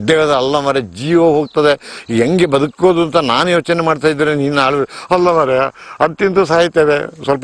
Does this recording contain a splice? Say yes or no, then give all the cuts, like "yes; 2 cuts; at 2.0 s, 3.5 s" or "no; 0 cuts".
no; 0 cuts